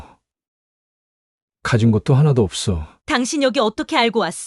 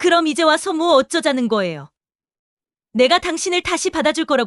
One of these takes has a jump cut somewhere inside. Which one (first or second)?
first